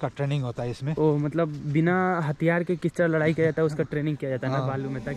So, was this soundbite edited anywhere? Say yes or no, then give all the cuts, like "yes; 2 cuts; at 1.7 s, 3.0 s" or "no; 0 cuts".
no; 0 cuts